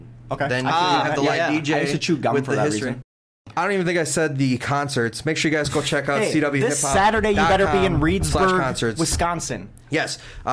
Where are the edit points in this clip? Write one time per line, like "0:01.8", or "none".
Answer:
0:03.3